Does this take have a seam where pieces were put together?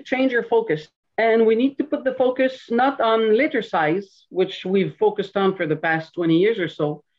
yes; 1 cut; at 1.0 s

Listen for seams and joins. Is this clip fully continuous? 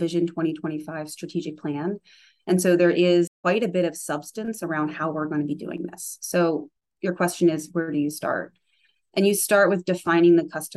yes; 0 cuts

